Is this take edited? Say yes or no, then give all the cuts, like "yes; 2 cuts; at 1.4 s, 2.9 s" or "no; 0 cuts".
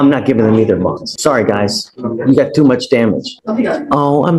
yes; 2 cuts; at 1.1 s, 3.3 s